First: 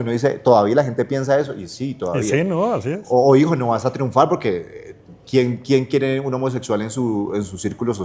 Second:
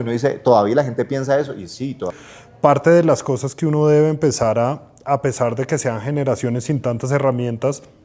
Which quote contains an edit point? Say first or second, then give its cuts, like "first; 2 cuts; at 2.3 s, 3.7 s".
second; 1 cut; at 2.1 s